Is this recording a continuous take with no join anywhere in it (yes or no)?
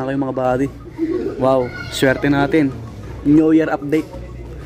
yes